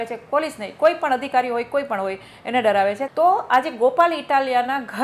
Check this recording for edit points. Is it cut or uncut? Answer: cut